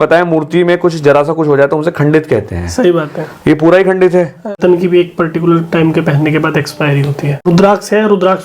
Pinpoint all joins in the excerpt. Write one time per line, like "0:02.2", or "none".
0:04.5
0:07.5